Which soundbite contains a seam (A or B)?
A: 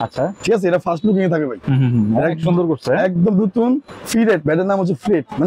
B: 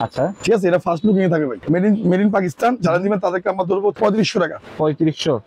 B